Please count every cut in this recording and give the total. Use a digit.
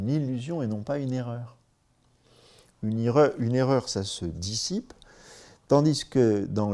0